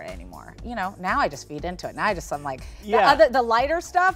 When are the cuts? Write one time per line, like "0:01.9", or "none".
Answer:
none